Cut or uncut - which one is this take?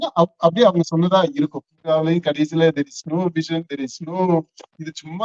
cut